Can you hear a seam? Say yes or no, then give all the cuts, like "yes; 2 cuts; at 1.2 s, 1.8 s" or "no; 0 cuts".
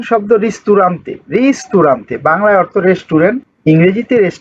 yes; 1 cut; at 3.5 s